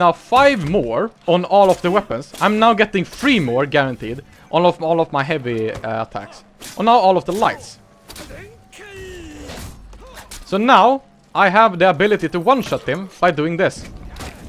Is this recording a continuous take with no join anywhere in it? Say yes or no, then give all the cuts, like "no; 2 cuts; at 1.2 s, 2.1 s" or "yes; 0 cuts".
no; 1 cut; at 1.1 s